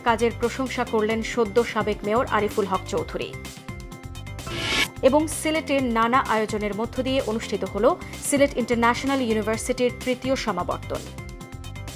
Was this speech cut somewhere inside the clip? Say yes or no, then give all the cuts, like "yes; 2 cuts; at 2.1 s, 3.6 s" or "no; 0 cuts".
no; 0 cuts